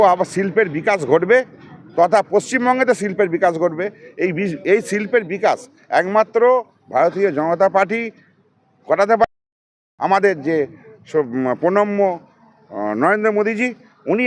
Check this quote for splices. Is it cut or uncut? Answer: uncut